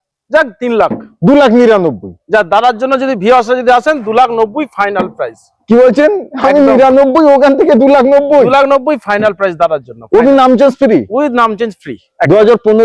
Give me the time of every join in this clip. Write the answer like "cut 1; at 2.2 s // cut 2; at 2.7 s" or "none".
none